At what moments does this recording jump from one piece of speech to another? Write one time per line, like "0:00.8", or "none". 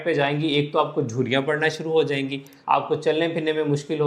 0:02.5